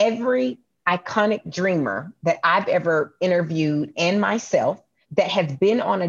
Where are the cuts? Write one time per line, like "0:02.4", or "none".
0:05.0